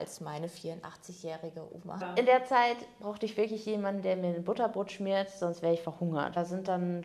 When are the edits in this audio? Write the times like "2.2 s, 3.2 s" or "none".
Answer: 2.0 s, 6.4 s